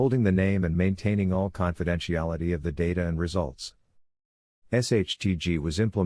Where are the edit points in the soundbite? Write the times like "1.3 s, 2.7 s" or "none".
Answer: 2.8 s

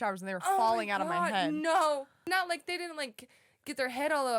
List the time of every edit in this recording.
2.3 s

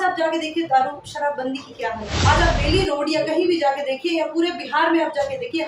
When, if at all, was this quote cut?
2.1 s

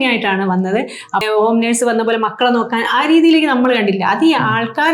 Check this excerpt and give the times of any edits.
1.2 s

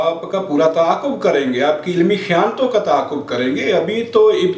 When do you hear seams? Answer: none

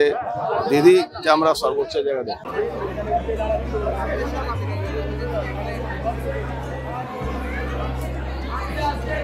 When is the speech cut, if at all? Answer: 2.4 s

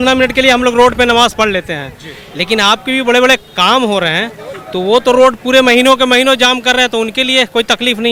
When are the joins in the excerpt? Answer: none

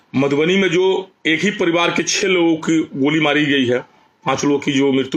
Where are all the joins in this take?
none

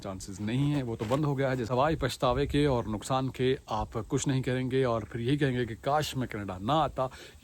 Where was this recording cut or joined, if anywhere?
1.7 s

